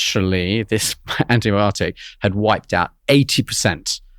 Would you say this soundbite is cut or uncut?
uncut